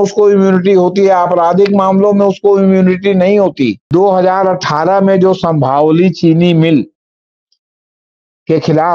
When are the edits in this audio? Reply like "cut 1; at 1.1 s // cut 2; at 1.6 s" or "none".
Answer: cut 1; at 3.9 s